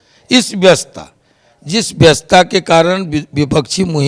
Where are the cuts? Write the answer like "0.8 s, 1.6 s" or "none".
none